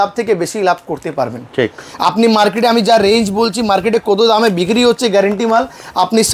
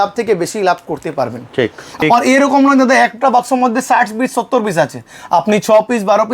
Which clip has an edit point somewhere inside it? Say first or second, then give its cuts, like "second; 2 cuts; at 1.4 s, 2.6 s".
second; 1 cut; at 2.0 s